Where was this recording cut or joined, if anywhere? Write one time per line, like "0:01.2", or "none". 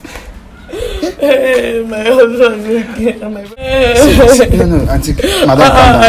0:03.6